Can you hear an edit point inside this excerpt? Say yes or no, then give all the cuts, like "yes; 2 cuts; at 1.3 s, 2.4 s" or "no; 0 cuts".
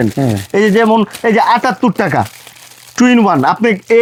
no; 0 cuts